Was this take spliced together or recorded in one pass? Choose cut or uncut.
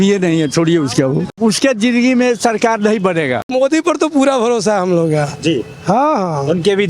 cut